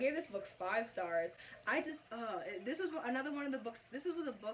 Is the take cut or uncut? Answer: uncut